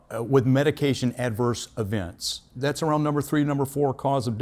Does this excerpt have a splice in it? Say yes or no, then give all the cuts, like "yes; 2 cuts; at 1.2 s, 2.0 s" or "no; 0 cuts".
yes; 1 cut; at 2.5 s